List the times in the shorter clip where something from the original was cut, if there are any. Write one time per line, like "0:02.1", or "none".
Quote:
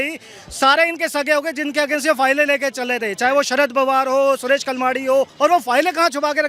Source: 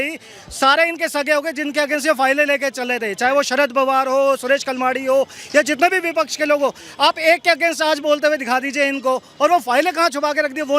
0:05.3

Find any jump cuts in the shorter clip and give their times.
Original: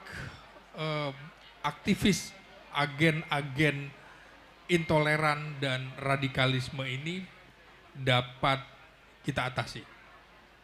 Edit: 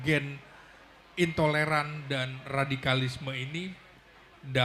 none

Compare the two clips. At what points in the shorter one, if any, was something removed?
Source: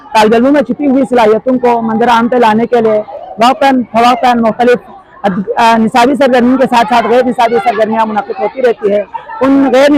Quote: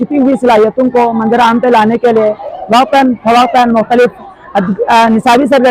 none

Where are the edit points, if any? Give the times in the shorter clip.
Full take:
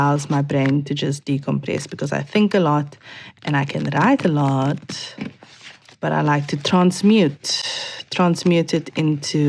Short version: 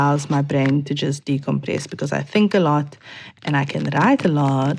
none

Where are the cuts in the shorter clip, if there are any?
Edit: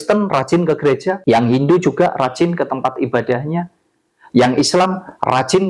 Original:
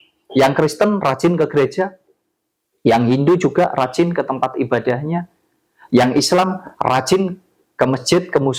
0:01.2

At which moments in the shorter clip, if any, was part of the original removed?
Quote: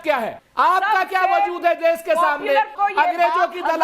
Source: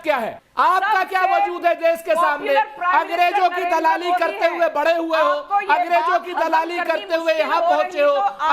0:02.7

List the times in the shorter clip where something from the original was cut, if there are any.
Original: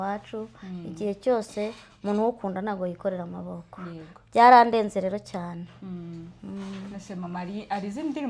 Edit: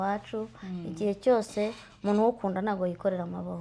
none

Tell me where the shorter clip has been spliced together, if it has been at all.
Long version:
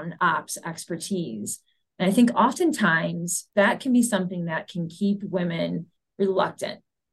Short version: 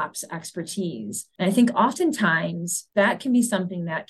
0:01.2

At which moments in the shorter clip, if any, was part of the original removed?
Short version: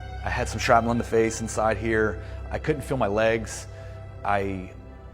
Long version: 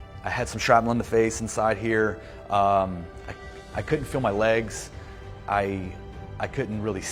0:02.3

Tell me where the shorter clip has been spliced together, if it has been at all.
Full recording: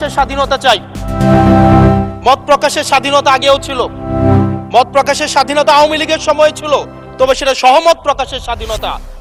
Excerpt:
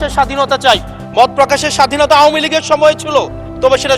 0:01.0

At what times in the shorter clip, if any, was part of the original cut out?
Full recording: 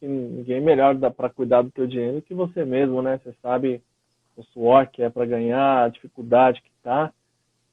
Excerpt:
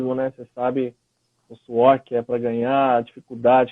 none

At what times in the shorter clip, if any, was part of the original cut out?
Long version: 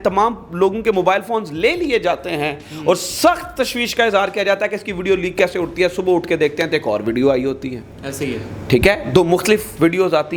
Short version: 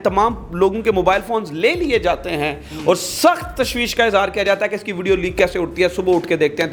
none

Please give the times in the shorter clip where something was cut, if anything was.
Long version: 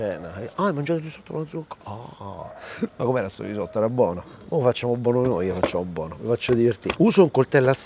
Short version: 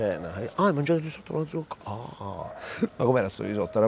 none

